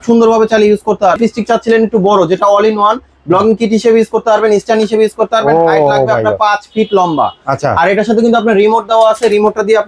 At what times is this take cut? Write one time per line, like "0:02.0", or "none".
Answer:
0:01.2